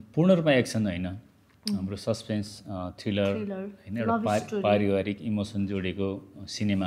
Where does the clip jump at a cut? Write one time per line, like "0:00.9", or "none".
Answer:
none